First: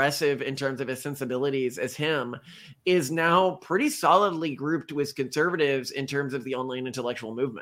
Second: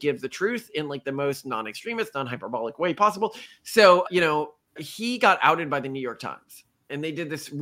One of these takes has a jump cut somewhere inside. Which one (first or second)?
second